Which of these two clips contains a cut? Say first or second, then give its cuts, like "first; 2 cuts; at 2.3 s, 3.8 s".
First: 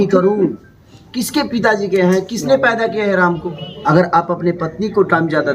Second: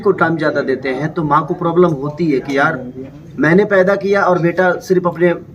first; 1 cut; at 3.7 s